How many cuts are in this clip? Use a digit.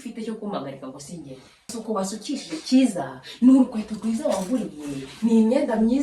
1